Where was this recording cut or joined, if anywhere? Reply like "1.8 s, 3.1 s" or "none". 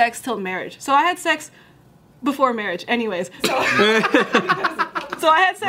3.4 s